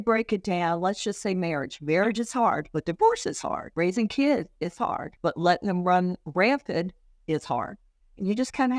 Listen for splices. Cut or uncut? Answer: cut